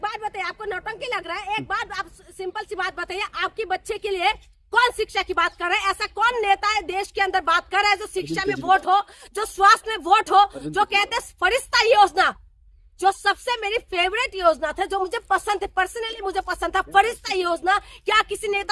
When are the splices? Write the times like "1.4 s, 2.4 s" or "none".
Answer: none